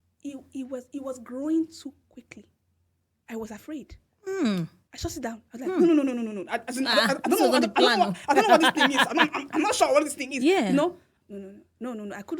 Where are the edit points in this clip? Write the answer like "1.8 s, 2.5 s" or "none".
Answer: 11.1 s